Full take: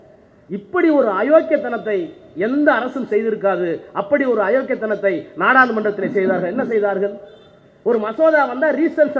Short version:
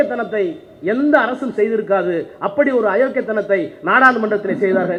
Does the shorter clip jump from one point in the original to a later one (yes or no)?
no